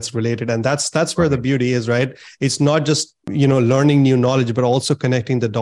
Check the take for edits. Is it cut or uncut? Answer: cut